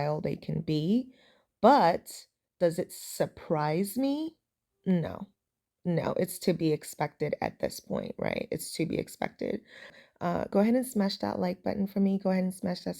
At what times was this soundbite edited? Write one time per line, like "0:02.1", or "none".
0:10.0